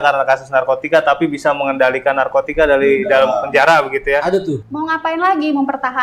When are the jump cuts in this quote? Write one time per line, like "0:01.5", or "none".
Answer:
0:04.7